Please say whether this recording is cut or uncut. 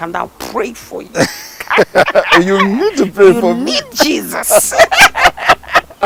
uncut